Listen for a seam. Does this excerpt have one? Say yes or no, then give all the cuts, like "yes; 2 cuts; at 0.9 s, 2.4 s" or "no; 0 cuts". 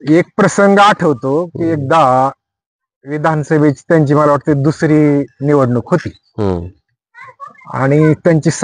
no; 0 cuts